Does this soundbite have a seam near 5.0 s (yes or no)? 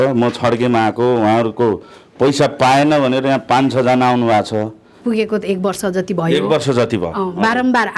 yes